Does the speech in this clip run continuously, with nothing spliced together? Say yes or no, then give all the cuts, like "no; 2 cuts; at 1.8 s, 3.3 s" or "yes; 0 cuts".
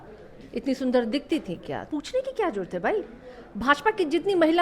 no; 1 cut; at 1.8 s